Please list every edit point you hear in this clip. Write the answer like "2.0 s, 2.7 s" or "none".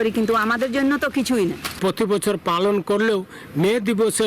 1.8 s